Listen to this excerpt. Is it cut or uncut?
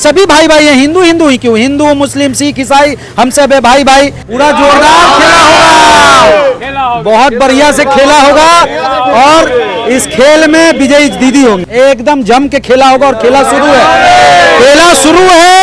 cut